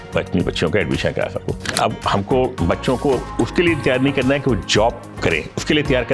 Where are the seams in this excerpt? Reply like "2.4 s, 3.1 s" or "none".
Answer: 1.7 s

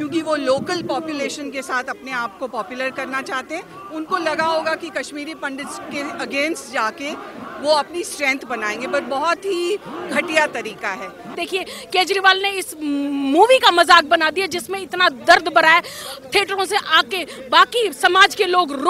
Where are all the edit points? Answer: 11.3 s

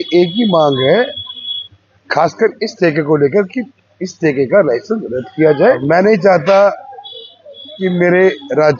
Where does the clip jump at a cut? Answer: 5.8 s

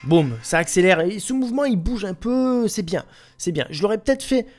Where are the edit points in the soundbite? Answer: none

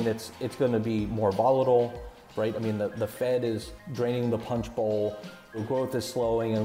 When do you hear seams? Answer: 2.3 s, 3.8 s, 5.6 s

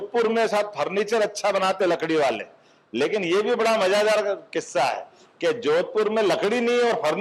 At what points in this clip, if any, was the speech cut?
none

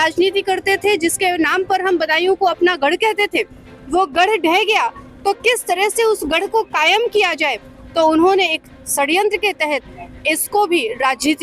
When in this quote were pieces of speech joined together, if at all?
none

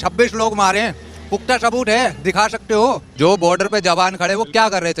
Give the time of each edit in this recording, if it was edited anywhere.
3.1 s

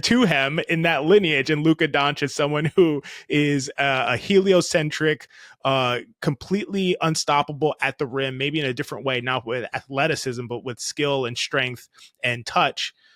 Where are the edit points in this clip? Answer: none

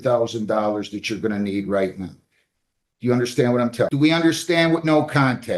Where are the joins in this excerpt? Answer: 3.9 s

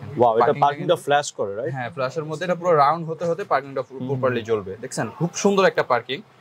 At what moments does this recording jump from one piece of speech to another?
none

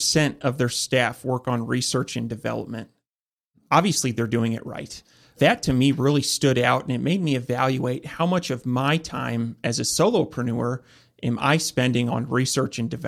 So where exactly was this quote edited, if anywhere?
5.4 s, 12.1 s

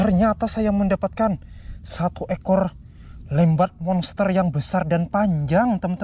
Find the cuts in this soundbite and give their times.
none

